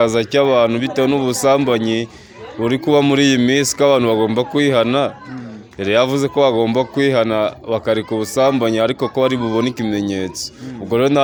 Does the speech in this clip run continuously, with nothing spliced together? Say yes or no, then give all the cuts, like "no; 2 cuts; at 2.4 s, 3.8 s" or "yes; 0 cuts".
yes; 0 cuts